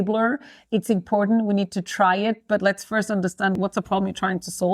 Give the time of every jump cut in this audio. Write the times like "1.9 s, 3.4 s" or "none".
3.6 s